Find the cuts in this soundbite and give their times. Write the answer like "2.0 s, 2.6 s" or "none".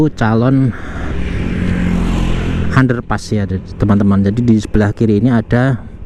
none

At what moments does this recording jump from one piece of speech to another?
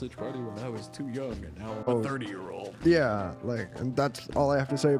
1.9 s

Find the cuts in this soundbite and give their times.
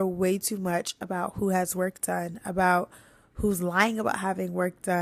none

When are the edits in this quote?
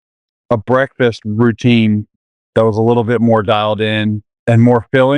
2.1 s, 4.3 s

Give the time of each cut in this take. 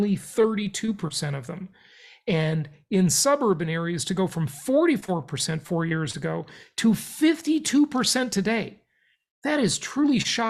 none

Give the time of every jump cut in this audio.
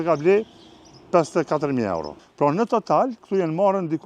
2.2 s

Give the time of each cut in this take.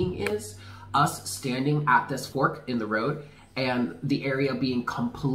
2.2 s

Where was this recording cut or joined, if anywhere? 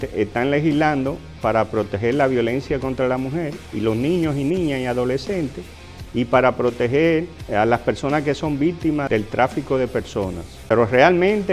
10.5 s

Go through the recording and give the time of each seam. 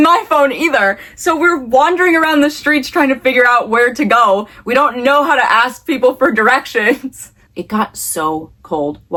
none

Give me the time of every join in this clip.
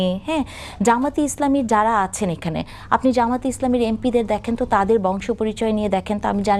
none

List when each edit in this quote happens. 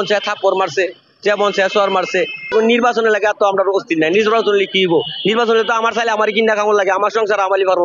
2.5 s

